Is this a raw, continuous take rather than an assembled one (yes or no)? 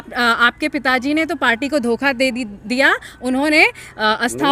yes